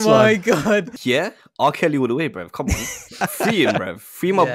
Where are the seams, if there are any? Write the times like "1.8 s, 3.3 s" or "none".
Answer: 0.9 s, 3.2 s